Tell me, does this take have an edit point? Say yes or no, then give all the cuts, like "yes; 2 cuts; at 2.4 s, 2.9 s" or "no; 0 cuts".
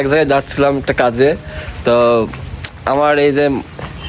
no; 0 cuts